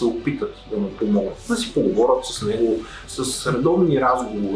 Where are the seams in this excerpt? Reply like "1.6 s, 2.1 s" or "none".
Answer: 1.4 s, 3.1 s

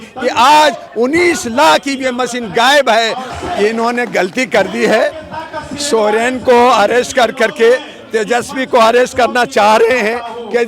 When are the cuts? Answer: 3.2 s

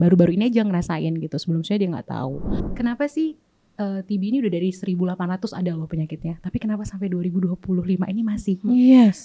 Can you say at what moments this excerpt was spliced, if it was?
2.6 s

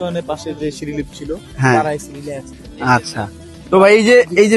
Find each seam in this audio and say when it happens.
none

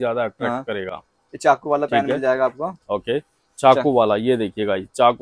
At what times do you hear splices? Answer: none

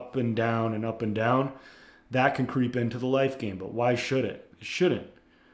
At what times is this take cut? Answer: 4.5 s

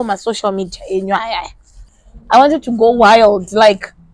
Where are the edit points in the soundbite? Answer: 1.9 s

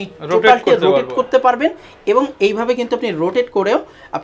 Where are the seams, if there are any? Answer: none

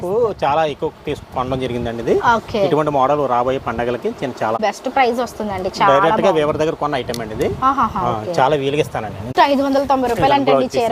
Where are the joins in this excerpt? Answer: 4.6 s, 9.3 s

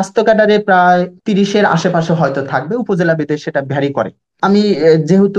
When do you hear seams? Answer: 1.2 s, 4.4 s

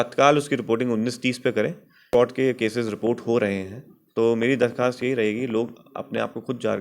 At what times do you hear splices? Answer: 2.1 s

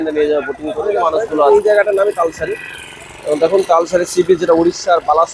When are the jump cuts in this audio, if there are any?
1.5 s

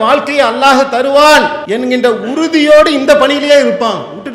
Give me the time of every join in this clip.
1.6 s

